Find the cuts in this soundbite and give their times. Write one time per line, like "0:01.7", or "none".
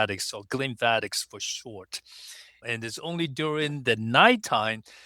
0:02.6

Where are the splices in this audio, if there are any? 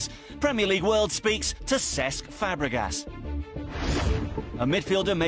none

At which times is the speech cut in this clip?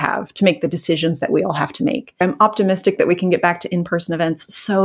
0:02.2

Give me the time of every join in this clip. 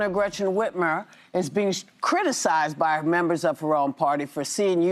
none

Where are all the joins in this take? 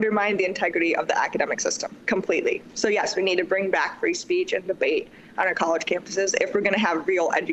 none

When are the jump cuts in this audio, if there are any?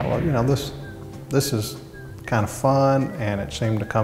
none

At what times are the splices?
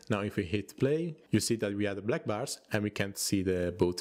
0:01.2

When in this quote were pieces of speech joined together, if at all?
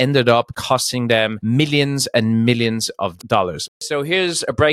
0:03.7

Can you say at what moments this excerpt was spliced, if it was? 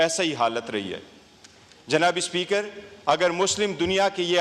none

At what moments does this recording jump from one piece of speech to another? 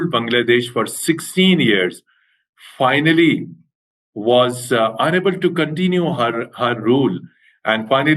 none

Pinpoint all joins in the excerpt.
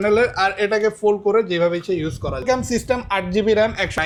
none

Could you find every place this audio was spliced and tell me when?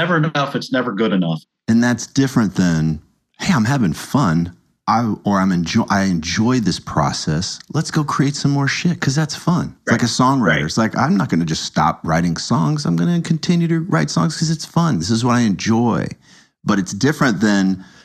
0:01.4

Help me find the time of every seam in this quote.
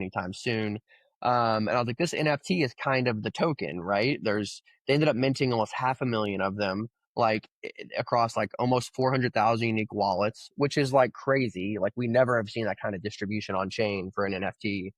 none

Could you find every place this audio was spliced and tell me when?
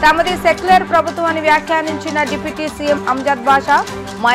none

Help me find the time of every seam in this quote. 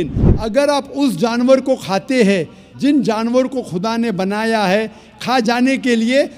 none

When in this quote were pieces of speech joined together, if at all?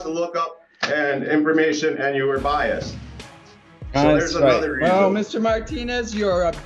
none

